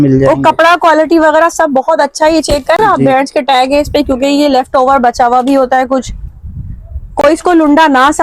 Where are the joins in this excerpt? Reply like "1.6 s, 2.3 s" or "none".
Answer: none